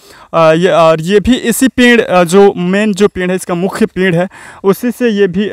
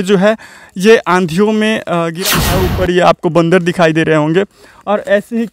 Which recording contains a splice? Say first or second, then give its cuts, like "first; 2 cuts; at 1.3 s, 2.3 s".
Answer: second; 1 cut; at 2.2 s